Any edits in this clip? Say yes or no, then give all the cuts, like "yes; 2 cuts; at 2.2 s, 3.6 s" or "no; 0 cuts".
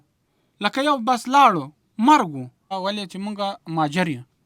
yes; 1 cut; at 2.7 s